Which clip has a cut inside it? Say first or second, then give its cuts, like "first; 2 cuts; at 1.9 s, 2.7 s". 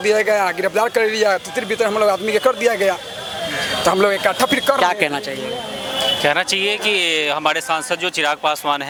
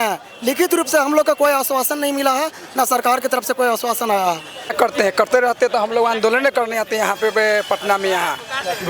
second; 1 cut; at 4.7 s